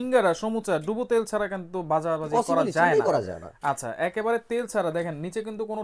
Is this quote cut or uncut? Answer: uncut